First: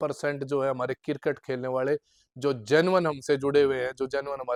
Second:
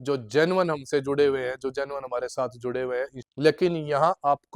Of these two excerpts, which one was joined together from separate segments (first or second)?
second